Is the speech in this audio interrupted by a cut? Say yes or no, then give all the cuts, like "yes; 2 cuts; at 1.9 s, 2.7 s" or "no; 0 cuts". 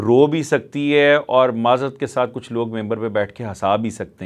no; 0 cuts